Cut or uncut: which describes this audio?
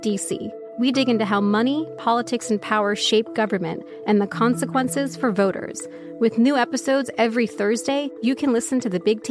uncut